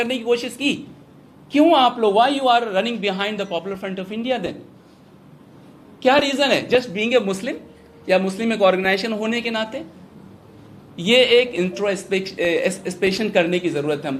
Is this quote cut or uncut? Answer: uncut